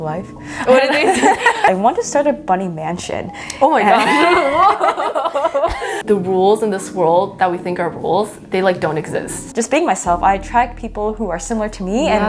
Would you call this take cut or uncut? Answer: cut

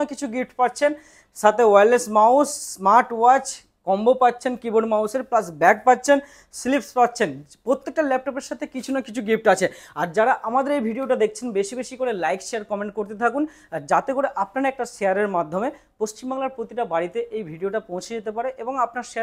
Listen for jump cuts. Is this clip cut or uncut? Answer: uncut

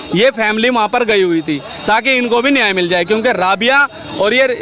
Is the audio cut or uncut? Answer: uncut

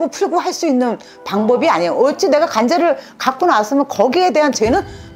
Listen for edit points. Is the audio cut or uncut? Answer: uncut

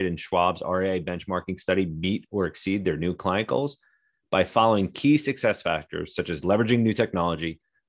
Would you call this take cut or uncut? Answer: uncut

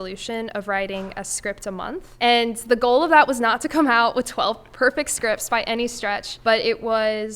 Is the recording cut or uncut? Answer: cut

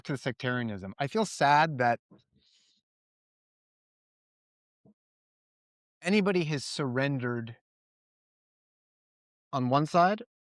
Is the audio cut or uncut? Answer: uncut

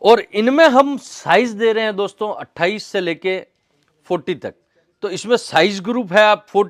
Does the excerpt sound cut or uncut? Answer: uncut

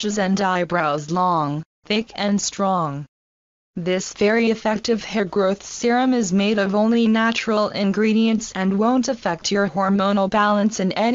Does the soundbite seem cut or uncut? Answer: cut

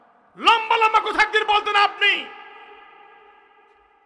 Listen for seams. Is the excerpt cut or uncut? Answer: uncut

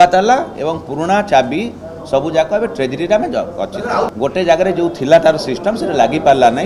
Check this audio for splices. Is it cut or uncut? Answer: cut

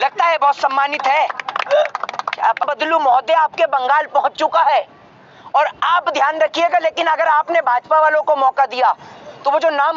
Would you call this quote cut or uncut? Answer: cut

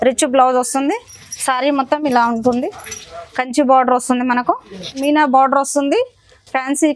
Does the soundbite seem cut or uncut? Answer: cut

